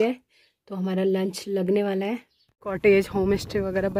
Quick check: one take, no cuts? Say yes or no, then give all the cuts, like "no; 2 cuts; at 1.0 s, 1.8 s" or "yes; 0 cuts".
no; 1 cut; at 2.6 s